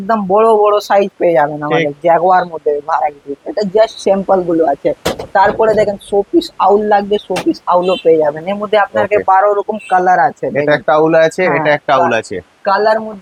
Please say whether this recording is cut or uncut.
uncut